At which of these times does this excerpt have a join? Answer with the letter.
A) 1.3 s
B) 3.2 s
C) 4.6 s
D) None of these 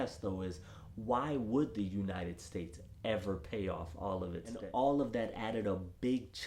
C